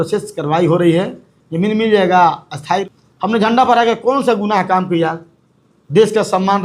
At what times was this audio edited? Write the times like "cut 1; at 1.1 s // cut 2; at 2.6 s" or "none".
cut 1; at 2.8 s